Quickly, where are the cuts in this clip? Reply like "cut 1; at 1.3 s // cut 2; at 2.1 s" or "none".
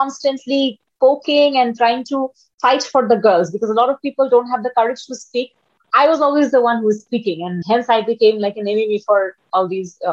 cut 1; at 7.6 s